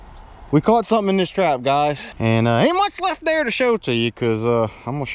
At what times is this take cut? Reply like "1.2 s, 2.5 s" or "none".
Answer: 2.1 s